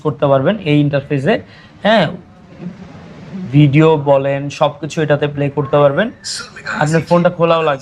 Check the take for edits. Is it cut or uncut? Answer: uncut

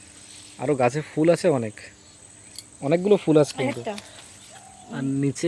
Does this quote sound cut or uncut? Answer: uncut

